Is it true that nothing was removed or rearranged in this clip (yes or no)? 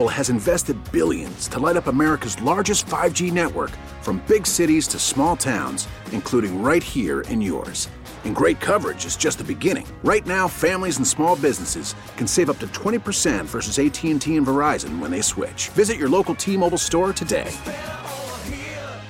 yes